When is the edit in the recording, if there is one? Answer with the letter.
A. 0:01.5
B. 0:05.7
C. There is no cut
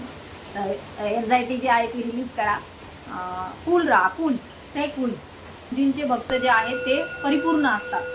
B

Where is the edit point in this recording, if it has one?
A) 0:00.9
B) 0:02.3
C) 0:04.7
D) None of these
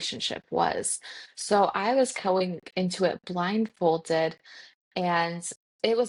D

